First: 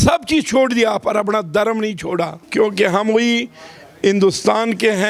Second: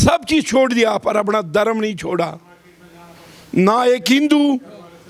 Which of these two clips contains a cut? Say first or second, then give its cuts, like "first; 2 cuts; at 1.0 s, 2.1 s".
first; 1 cut; at 2.4 s